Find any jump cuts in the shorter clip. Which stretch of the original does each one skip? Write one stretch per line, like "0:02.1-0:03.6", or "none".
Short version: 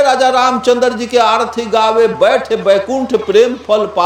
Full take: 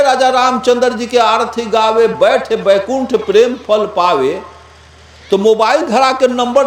none